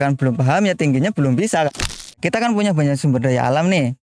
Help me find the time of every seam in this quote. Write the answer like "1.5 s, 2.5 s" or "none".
1.7 s

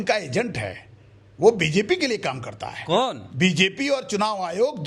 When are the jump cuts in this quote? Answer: none

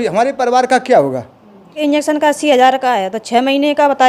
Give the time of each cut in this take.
1.8 s

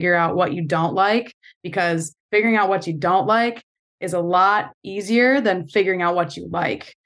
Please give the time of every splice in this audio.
none

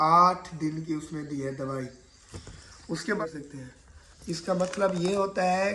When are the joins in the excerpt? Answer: 3.2 s

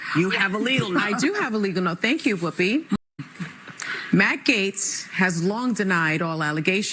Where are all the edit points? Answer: 3.0 s

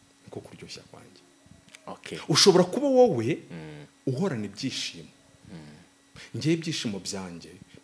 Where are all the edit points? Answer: none

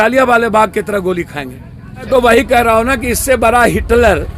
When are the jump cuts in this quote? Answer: 2.1 s

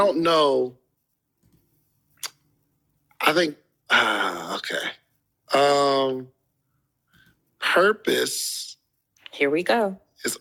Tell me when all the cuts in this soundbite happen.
none

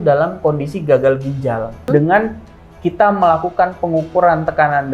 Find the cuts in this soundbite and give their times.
1.9 s

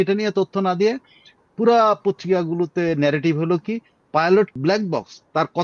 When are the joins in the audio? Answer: 4.6 s

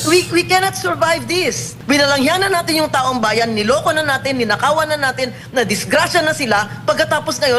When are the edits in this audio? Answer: 1.7 s

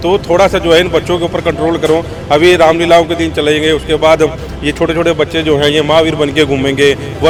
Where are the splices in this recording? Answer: none

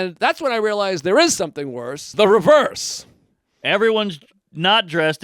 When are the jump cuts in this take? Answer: 2.0 s

